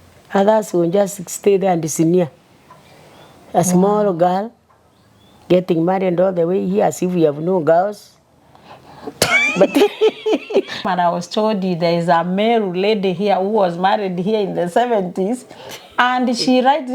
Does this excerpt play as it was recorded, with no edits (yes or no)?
no